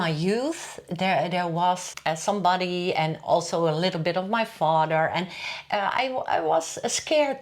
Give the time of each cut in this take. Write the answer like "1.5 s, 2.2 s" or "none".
1.9 s